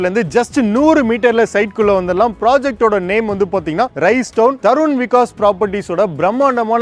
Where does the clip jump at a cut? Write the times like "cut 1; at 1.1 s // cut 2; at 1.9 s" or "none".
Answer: cut 1; at 4.6 s